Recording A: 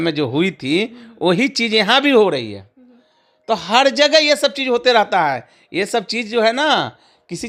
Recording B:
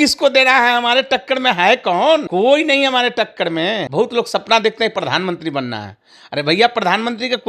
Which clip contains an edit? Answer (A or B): B